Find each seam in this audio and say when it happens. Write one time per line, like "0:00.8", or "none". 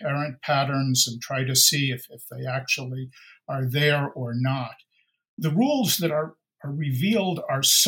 0:05.4